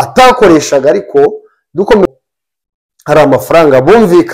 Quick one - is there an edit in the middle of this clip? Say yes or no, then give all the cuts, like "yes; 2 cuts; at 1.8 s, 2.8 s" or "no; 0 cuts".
yes; 1 cut; at 2.1 s